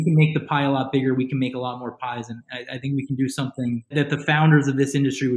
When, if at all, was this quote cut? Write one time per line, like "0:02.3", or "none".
none